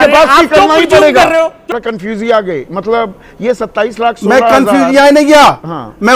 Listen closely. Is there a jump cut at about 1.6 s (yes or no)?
yes